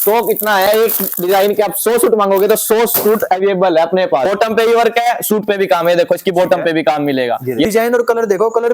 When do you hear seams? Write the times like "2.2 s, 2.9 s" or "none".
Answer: 4.3 s, 7.6 s